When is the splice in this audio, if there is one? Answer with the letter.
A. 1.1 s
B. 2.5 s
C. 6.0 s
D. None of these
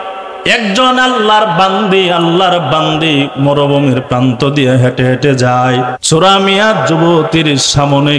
C